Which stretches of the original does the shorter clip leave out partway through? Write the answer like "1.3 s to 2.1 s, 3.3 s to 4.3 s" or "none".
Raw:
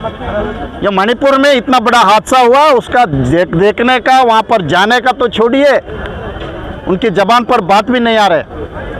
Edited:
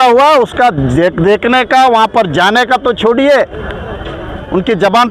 none

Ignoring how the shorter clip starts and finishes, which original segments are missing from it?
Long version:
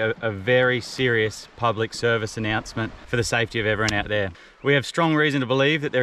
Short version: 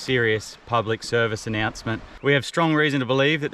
3.0 s to 4.5 s

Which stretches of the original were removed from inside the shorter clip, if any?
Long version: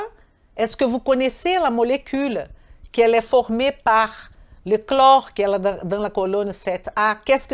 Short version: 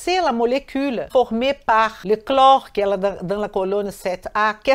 2.5 s to 3.3 s, 4.2 s to 4.6 s

